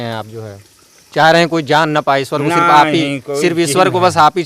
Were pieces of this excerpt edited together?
no; 0 cuts

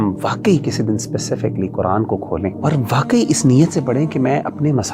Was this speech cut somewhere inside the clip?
yes; 1 cut; at 2.6 s

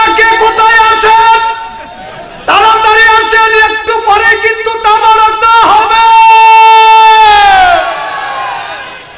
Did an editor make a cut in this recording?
no; 0 cuts

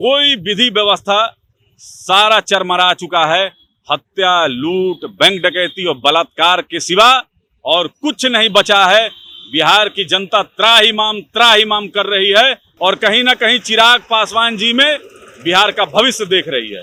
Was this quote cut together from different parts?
no; 0 cuts

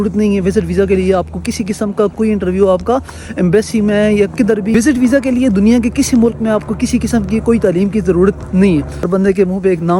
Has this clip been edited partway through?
yes; 2 cuts; at 4.7 s, 9.0 s

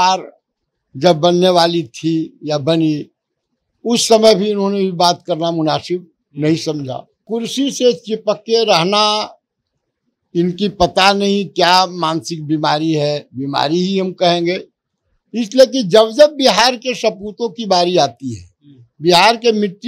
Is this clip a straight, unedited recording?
no; 1 cut; at 7.2 s

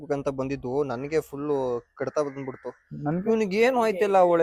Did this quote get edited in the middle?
no; 0 cuts

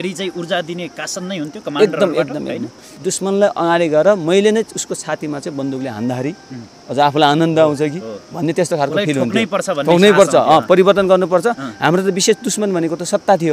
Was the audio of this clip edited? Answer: yes; 1 cut; at 2.9 s

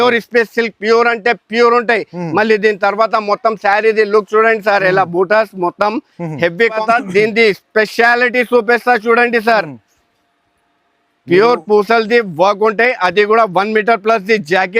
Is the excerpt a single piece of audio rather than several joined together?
no; 1 cut; at 6.8 s

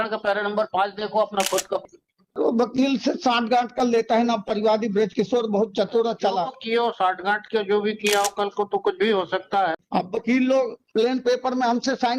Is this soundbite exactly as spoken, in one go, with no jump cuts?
no; 2 cuts; at 1.8 s, 9.8 s

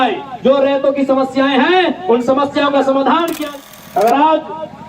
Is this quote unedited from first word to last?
no; 1 cut; at 3.4 s

